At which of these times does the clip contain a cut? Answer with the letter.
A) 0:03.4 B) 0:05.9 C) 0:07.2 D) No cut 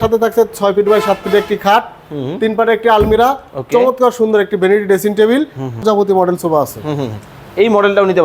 B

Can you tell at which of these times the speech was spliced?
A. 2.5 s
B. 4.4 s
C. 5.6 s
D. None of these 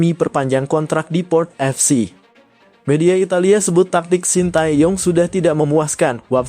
A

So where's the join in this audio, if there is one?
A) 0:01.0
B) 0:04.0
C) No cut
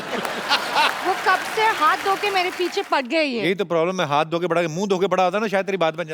A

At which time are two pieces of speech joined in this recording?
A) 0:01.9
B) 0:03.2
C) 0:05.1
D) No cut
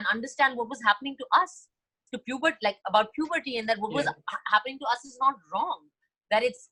D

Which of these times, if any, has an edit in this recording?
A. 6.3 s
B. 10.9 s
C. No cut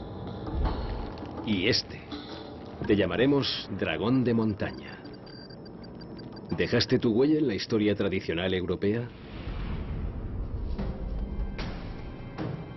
A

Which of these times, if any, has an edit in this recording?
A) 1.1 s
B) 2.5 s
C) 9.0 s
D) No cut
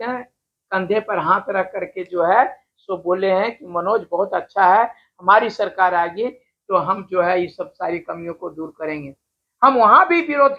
D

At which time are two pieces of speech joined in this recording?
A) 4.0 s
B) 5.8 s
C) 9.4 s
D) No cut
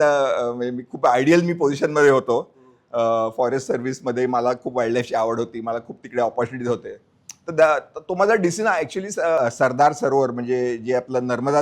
C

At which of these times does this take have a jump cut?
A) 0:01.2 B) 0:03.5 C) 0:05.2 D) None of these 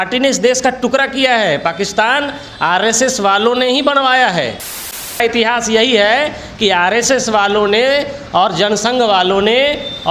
C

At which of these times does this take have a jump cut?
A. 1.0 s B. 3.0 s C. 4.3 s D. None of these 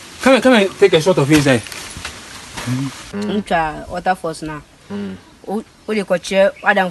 B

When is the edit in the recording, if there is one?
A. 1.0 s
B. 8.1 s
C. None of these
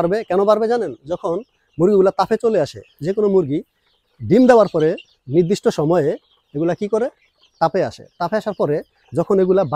C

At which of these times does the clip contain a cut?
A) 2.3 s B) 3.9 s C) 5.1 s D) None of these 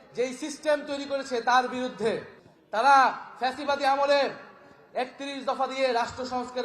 A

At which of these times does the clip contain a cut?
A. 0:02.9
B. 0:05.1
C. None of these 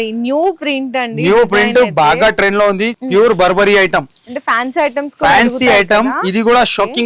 A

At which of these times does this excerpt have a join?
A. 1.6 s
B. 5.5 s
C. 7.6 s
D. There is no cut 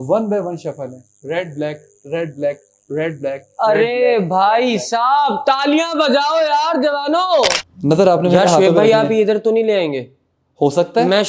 C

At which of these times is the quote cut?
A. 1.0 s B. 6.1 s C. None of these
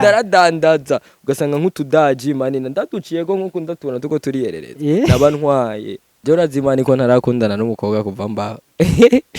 B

